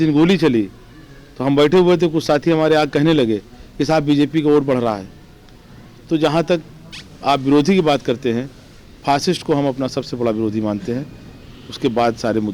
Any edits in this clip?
no; 0 cuts

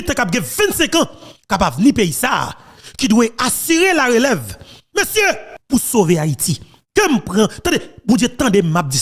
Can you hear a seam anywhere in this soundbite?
no; 0 cuts

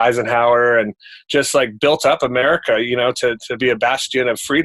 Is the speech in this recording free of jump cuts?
yes; 0 cuts

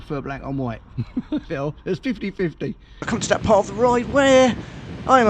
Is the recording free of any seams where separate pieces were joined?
no; 1 cut; at 3.0 s

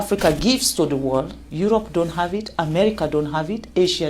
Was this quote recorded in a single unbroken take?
no; 1 cut; at 1.4 s

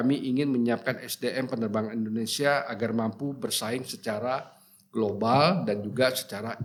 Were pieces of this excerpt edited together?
no; 0 cuts

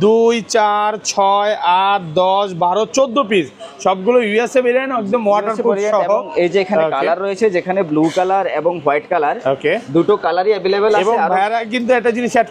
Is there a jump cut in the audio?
no; 0 cuts

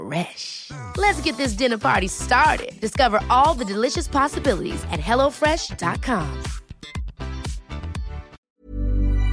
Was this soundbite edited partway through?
yes; 1 cut; at 8.4 s

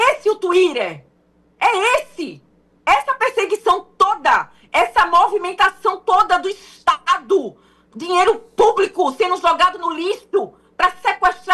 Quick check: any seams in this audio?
no; 0 cuts

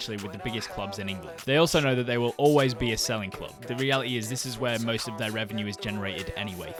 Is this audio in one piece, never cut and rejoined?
yes; 0 cuts

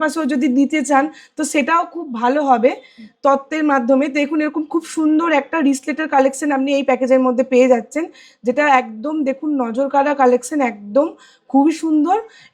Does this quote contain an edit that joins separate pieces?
no; 0 cuts

